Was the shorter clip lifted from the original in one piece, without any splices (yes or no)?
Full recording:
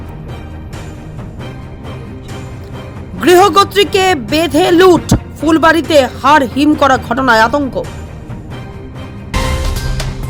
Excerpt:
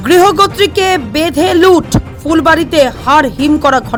yes